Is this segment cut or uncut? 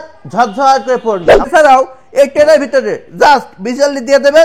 cut